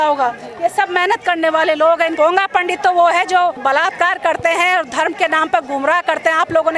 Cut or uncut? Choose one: cut